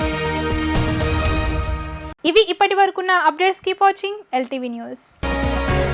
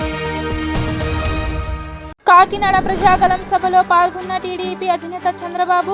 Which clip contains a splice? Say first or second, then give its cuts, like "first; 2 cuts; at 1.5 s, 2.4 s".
second; 1 cut; at 2.0 s